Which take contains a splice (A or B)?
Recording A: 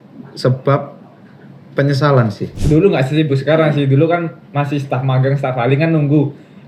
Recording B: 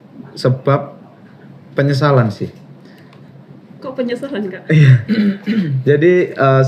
A